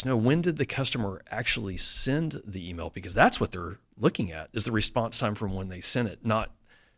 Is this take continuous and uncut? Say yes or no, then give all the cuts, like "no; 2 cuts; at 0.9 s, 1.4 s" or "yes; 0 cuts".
yes; 0 cuts